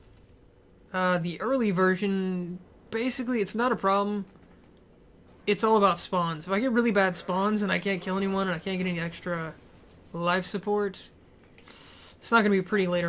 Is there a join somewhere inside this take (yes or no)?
yes